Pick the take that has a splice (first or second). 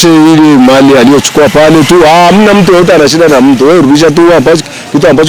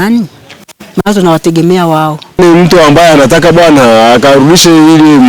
second